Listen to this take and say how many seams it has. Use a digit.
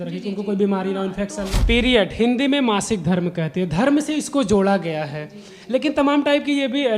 1